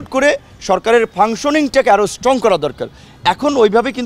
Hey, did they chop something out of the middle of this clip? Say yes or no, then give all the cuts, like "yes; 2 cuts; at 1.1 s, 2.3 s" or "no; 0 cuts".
no; 0 cuts